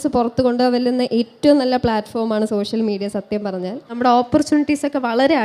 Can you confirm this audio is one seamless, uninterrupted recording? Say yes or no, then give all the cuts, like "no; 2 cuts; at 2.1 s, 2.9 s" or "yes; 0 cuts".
no; 1 cut; at 3.9 s